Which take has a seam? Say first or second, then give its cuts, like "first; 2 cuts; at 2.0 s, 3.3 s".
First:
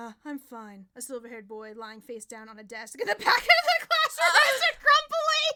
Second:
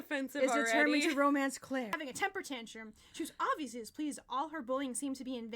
second; 1 cut; at 2.1 s